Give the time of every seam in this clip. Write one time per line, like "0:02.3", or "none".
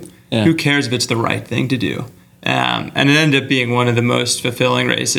none

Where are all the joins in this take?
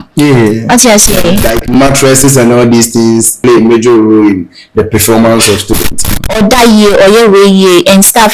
0:01.5
0:03.4
0:06.2

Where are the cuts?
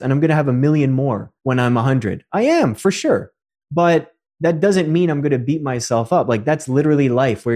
0:01.3

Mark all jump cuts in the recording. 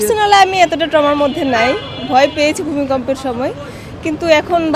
none

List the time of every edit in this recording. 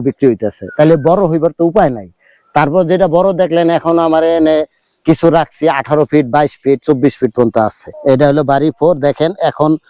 0:07.9

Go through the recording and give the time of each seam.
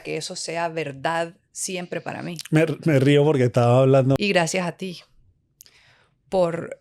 0:04.2

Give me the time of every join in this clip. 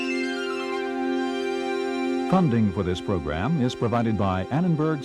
none

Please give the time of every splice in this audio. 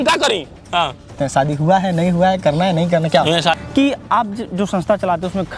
0:01.1
0:03.6

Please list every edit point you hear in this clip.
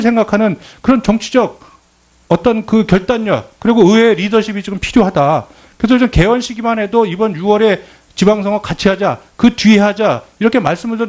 0:05.2

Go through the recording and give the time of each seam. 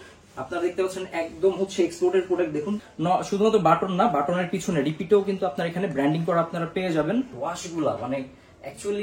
0:02.9
0:07.3

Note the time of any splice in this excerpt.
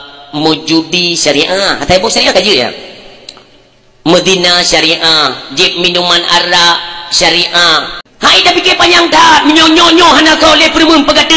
0:08.0

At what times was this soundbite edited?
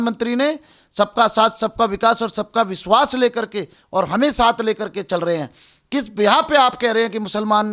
none

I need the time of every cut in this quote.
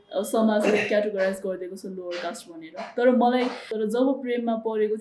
0:03.7

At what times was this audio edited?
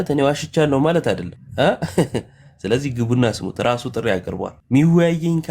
0:01.4
0:04.5

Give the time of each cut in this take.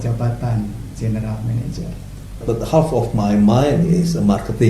0:02.4

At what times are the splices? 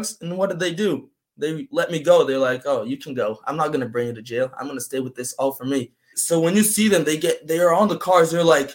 0:06.2

